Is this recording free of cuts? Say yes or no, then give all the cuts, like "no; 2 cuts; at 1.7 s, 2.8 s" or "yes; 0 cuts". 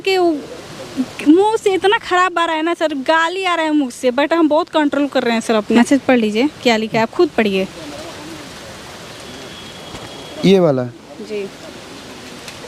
no; 1 cut; at 5.7 s